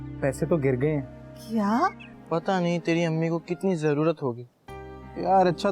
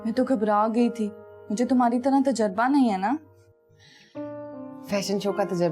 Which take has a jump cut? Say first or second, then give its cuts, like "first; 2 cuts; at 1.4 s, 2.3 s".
first; 1 cut; at 2.1 s